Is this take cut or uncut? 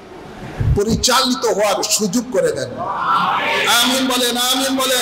uncut